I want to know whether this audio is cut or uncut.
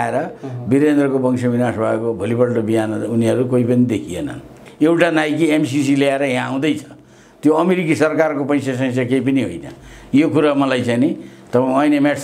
cut